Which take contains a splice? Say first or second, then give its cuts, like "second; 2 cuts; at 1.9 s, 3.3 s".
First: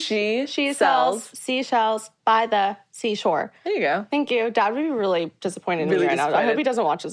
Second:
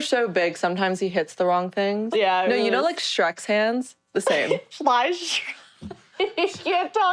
second; 2 cuts; at 2.0 s, 4.7 s